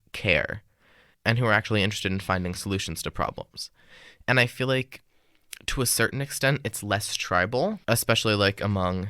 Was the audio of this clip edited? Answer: yes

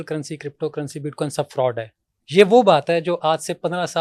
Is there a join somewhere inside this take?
no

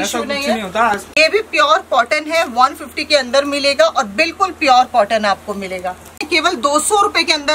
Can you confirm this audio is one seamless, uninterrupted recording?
no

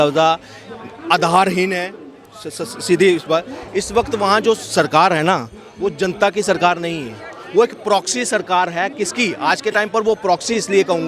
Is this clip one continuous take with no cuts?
yes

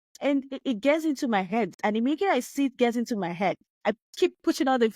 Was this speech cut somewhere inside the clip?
yes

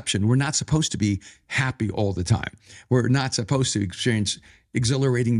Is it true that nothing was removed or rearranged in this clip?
yes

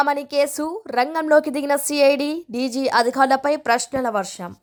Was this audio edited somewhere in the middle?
no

